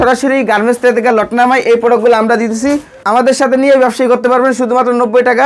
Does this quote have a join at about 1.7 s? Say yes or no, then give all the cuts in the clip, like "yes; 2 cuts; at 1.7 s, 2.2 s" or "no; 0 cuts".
no; 1 cut; at 2.9 s